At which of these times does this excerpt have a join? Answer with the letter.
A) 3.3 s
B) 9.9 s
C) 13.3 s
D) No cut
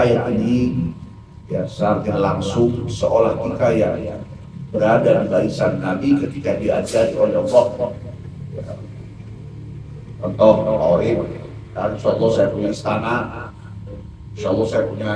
D